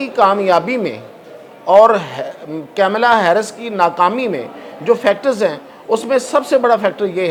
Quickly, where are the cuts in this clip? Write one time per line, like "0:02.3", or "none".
none